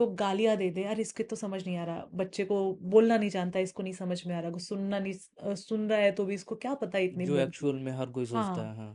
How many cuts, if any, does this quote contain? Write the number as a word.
zero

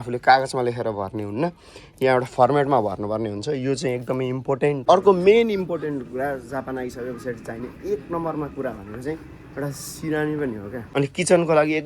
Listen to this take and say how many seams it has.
two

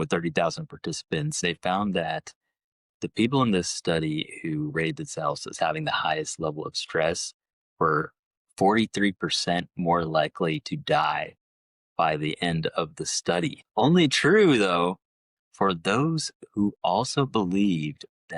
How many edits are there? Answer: two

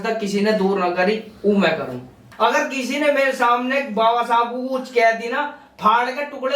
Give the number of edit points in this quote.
one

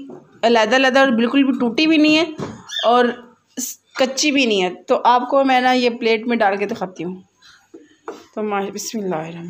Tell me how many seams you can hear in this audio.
zero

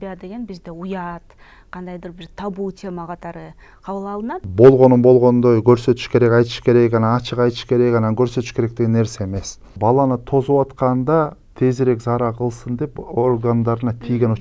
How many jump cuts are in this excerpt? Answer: two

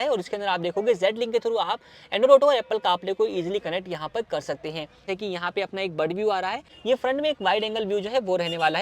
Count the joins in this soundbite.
two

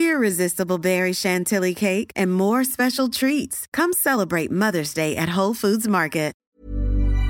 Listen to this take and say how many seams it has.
one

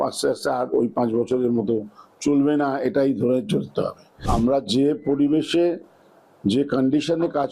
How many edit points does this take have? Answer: one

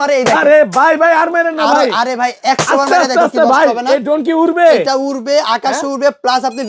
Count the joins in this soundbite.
zero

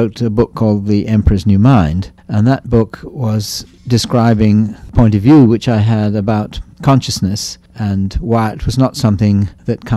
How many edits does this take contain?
one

